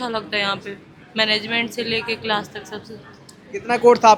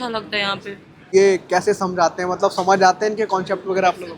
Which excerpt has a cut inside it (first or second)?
second